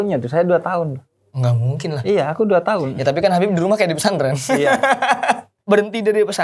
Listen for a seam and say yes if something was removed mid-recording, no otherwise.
yes